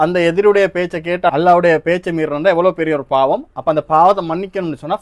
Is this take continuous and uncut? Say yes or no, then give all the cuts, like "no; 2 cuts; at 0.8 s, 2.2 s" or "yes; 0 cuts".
yes; 0 cuts